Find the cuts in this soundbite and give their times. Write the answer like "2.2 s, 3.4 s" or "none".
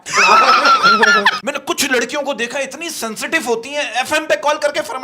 1.4 s